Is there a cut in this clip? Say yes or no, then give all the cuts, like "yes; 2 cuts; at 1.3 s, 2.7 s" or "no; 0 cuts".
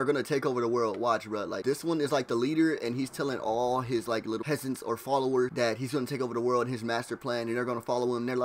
yes; 3 cuts; at 1.6 s, 4.4 s, 5.5 s